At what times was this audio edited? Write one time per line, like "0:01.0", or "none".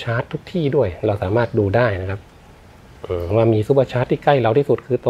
none